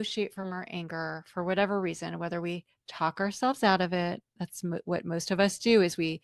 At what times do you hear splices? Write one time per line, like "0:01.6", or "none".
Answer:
none